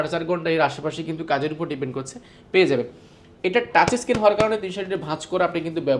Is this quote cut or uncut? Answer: uncut